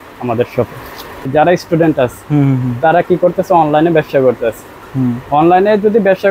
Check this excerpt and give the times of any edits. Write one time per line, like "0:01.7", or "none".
0:01.3